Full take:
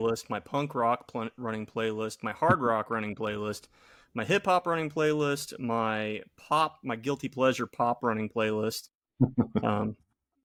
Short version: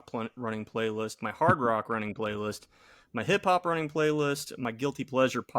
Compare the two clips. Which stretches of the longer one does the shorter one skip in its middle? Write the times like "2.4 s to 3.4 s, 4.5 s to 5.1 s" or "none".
5.6 s to 6.8 s